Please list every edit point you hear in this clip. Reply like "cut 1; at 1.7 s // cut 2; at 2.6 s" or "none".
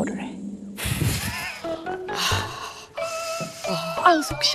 none